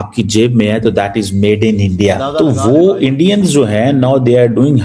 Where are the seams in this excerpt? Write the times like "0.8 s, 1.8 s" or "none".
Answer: 2.3 s